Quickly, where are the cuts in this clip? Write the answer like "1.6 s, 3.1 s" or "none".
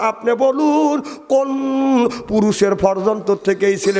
none